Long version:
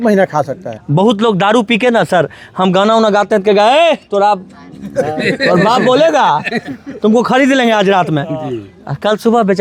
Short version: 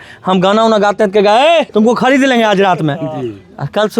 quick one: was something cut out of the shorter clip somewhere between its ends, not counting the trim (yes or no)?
yes